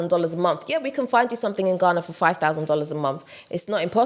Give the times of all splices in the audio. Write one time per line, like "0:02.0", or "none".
none